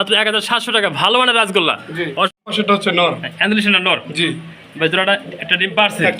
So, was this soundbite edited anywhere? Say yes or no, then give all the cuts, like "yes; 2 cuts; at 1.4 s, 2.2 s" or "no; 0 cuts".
yes; 1 cut; at 2.4 s